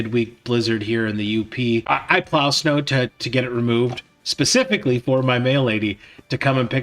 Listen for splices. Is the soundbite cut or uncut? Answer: cut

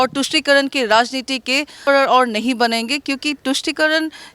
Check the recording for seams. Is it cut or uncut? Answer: cut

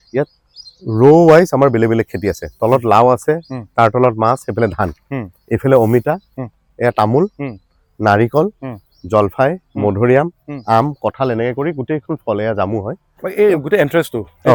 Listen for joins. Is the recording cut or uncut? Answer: uncut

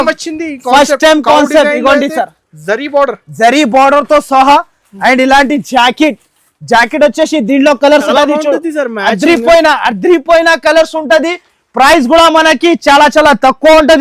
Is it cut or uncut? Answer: cut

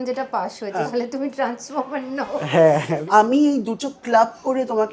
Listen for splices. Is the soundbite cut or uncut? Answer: cut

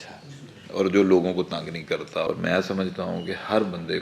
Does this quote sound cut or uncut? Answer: cut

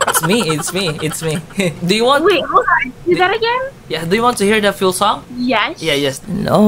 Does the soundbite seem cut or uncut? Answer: cut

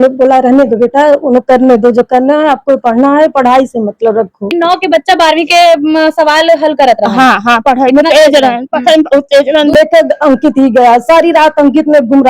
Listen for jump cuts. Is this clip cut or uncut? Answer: cut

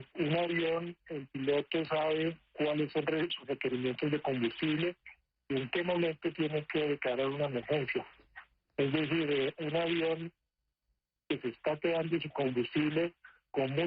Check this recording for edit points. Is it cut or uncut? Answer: cut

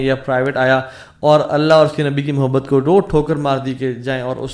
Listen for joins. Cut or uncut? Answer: uncut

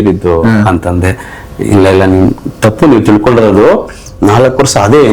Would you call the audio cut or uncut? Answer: cut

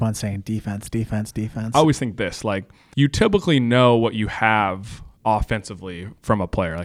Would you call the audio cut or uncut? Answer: cut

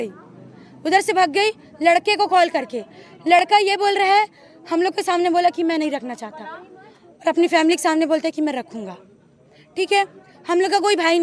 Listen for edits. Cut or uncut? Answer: uncut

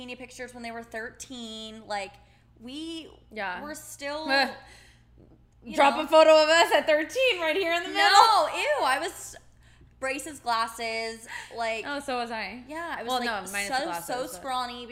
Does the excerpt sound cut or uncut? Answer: uncut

